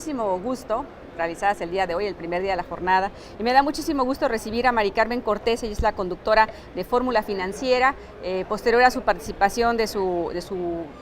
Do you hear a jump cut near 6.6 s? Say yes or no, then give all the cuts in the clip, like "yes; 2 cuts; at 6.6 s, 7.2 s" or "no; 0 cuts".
no; 1 cut; at 9.9 s